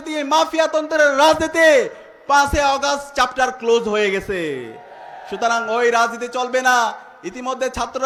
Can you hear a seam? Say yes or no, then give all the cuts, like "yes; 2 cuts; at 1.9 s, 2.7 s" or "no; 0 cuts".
no; 0 cuts